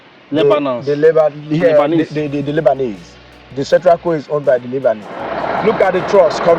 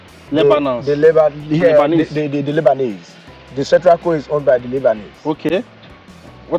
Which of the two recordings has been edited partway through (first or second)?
first